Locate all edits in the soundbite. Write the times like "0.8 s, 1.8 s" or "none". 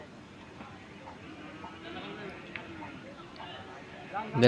none